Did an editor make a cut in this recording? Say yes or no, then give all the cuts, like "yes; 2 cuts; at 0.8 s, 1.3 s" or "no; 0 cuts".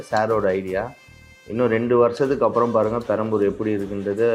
no; 0 cuts